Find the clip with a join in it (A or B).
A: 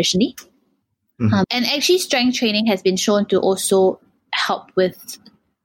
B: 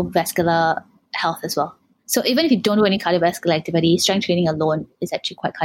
A